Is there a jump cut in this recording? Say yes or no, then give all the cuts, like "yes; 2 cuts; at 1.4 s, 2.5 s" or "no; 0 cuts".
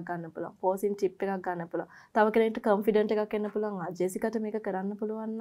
no; 0 cuts